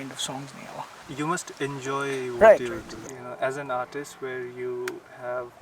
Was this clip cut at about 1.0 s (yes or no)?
yes